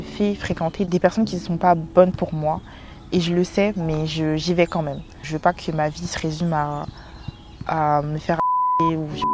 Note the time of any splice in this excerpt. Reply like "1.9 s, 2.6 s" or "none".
0.9 s, 5.2 s